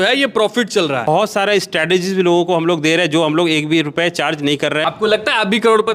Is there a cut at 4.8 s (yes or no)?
yes